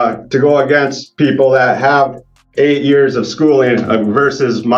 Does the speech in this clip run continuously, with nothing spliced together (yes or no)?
yes